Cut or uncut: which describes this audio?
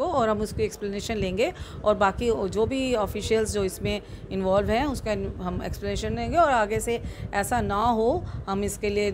uncut